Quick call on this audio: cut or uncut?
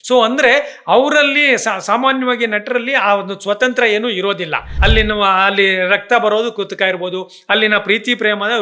cut